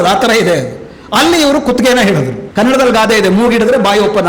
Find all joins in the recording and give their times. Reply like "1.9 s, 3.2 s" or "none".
2.4 s